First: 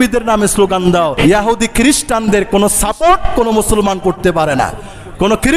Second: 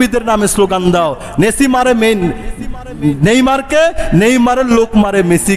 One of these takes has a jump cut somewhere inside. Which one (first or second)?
first